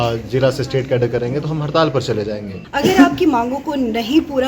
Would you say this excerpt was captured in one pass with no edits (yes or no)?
no